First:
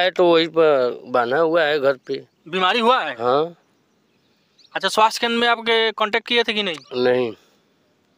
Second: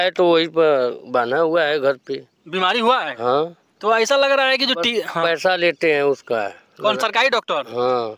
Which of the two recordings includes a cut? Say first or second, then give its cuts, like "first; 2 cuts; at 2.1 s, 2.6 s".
second; 1 cut; at 3.7 s